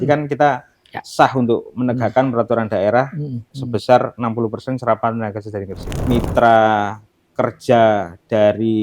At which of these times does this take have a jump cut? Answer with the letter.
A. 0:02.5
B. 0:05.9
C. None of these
B